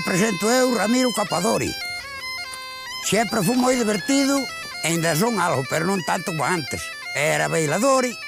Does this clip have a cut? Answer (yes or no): yes